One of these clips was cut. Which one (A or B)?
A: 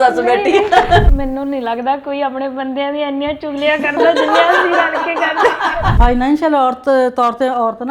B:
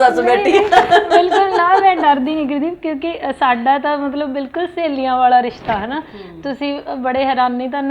A